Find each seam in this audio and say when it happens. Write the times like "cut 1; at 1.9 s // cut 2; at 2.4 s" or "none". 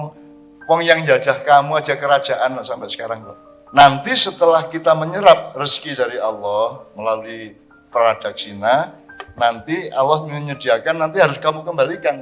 cut 1; at 3.8 s